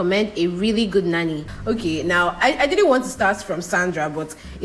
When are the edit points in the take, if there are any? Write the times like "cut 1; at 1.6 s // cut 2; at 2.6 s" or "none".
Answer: cut 1; at 1.5 s